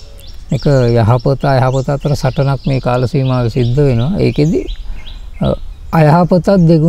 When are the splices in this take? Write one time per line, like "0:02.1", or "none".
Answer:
none